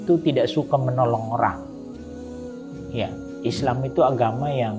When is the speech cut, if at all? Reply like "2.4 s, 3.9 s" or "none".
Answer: 1.5 s, 2.9 s